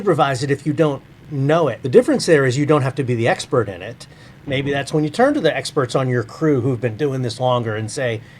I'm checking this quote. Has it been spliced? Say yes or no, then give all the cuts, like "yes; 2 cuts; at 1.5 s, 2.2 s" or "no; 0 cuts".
yes; 2 cuts; at 1.6 s, 4.4 s